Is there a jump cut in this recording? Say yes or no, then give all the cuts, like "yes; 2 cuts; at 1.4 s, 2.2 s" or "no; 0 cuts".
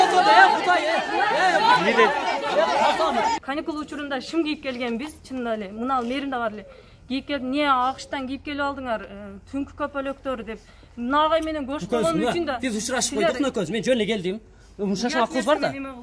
yes; 1 cut; at 3.4 s